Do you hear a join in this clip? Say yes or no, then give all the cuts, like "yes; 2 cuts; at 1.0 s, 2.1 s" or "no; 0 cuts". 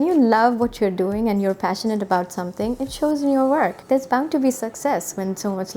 yes; 1 cut; at 3.8 s